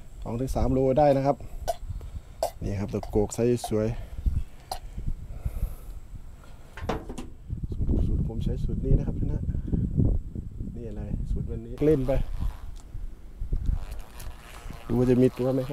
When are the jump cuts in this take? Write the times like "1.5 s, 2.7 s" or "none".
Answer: 6.8 s, 11.8 s